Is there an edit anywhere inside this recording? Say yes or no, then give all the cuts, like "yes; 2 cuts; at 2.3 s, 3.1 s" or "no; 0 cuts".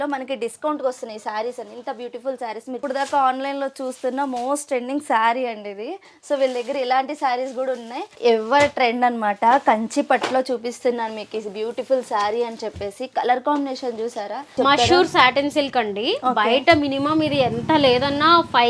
yes; 3 cuts; at 2.8 s, 8.0 s, 14.5 s